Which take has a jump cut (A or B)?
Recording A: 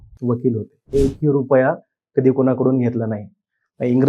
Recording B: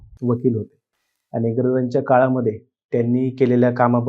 A